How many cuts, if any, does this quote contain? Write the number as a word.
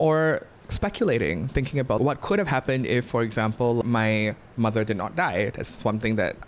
two